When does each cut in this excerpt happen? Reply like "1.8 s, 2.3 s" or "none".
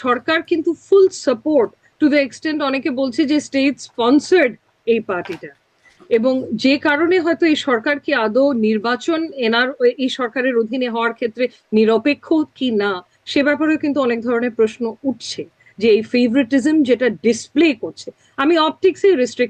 none